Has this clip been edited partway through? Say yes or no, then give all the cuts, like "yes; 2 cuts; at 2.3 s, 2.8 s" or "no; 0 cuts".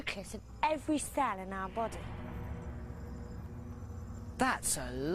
yes; 1 cut; at 2.3 s